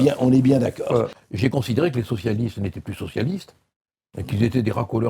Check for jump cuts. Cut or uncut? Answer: cut